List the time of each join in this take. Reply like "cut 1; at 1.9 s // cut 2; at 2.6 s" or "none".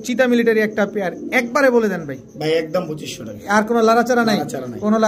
none